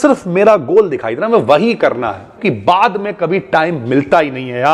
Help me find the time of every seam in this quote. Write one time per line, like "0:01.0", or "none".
0:02.4